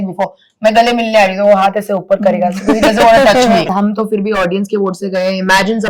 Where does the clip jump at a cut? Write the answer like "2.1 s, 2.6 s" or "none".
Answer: 3.7 s